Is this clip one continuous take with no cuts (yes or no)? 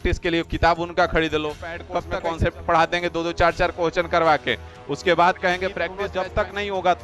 no